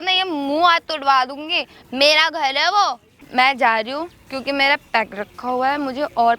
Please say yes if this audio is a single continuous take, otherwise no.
no